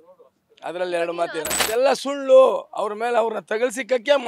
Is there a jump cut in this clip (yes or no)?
yes